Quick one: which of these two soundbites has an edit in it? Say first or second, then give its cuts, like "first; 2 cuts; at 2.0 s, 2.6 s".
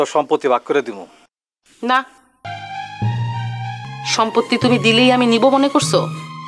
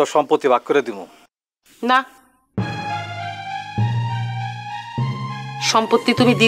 first; 2 cuts; at 2.4 s, 3.9 s